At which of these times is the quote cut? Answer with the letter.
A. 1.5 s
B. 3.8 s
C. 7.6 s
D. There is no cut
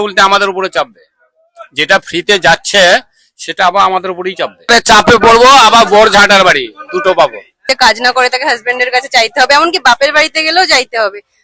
C